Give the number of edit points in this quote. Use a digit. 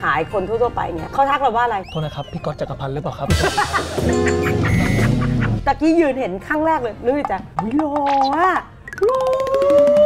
2